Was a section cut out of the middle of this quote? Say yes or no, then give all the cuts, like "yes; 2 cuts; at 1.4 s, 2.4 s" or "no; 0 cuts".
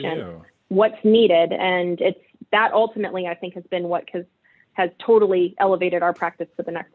no; 0 cuts